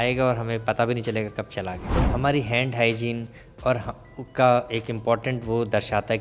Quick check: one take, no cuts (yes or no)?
no